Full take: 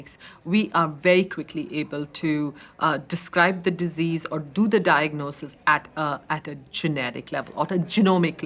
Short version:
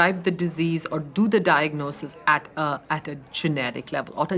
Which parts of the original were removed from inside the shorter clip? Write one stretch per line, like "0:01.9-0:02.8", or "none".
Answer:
none